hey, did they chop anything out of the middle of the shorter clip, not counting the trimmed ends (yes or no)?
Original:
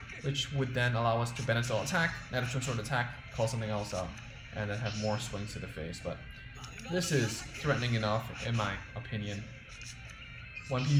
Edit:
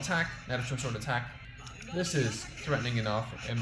yes